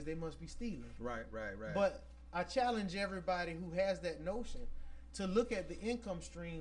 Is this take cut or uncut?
uncut